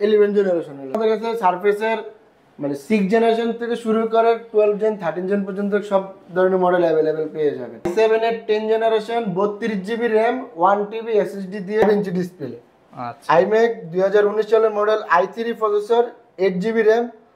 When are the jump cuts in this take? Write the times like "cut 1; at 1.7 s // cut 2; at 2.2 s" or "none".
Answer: cut 1; at 1.0 s // cut 2; at 7.9 s // cut 3; at 11.8 s